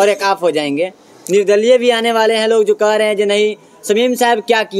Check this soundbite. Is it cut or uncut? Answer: uncut